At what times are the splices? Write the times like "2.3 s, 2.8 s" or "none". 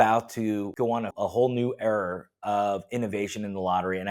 1.1 s